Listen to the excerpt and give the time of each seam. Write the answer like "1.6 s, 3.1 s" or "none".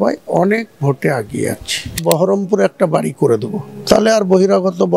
2.0 s